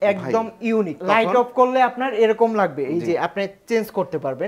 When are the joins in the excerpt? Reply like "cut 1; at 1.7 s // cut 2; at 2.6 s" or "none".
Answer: cut 1; at 1.0 s